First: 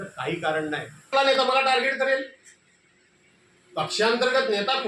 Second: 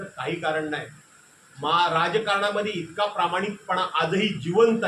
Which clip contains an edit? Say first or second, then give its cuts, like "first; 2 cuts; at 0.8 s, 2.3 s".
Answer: first; 1 cut; at 1.1 s